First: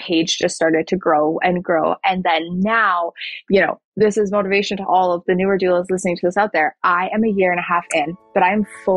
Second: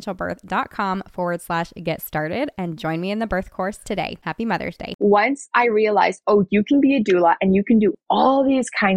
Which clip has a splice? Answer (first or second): second